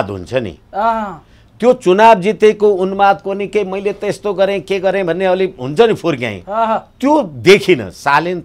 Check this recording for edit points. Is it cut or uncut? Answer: uncut